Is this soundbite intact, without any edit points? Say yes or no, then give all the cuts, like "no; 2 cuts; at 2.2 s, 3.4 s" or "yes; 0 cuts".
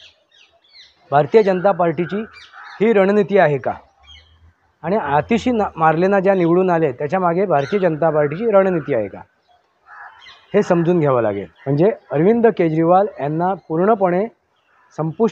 no; 1 cut; at 11.5 s